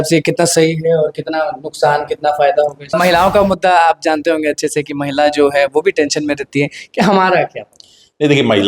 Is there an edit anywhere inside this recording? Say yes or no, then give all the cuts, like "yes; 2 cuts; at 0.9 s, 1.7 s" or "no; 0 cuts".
yes; 1 cut; at 2.9 s